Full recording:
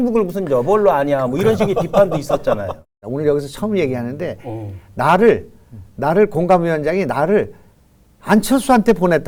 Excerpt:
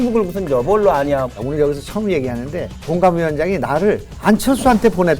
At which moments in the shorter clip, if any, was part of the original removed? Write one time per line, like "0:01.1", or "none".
0:01.3
0:02.9
0:04.1